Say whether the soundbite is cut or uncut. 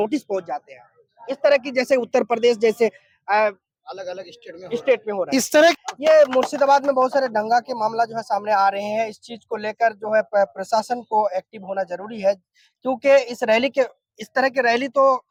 uncut